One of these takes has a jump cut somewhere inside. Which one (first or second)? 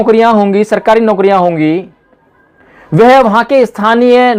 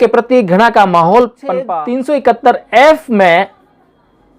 second